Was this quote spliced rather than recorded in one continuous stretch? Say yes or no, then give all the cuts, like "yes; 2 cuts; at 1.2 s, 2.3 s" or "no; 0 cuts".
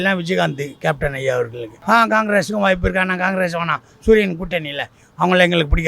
yes; 1 cut; at 1.7 s